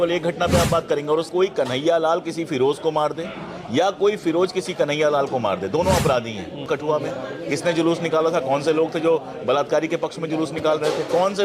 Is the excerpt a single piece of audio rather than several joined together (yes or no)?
no